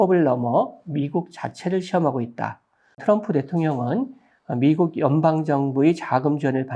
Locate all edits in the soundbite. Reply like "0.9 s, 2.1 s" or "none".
3.0 s